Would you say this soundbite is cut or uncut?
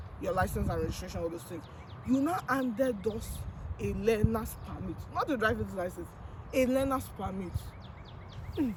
uncut